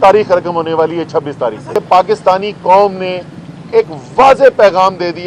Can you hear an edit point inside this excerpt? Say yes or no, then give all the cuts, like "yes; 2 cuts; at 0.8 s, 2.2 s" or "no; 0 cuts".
yes; 1 cut; at 1.8 s